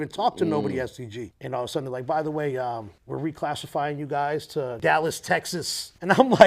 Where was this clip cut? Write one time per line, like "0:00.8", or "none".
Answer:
0:01.3
0:02.9
0:04.8